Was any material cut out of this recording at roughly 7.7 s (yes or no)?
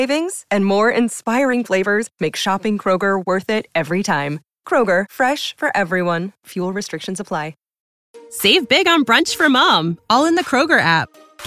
yes